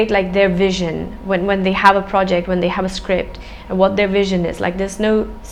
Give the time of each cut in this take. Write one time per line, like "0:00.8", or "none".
none